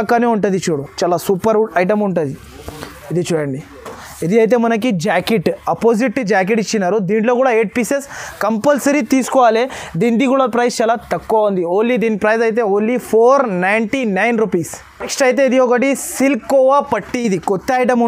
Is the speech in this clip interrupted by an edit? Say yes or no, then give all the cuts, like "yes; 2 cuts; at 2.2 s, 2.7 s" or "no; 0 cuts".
no; 0 cuts